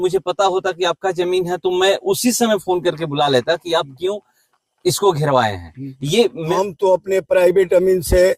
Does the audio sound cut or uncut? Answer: cut